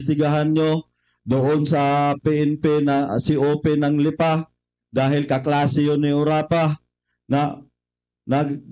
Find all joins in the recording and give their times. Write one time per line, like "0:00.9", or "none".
none

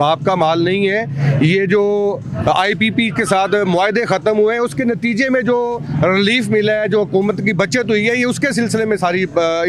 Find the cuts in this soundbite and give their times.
none

